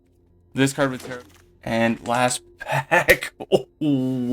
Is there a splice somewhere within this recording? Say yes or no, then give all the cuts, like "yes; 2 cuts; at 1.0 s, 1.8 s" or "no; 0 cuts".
yes; 1 cut; at 1.0 s